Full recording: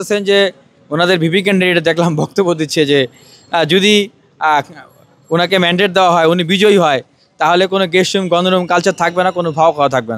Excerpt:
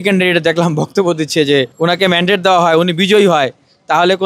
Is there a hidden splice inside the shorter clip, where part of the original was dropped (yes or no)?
yes